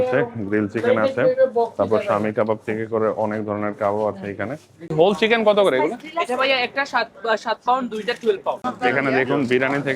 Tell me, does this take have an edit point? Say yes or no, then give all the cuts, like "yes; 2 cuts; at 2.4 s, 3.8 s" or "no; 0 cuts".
yes; 2 cuts; at 4.9 s, 8.6 s